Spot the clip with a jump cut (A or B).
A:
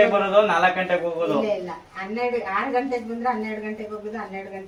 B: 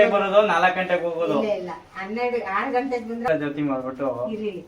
B